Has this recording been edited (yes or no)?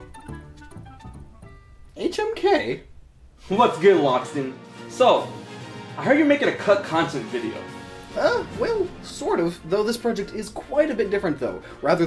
no